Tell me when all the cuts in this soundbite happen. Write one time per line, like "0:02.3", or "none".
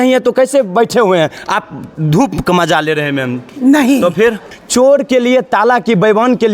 0:04.6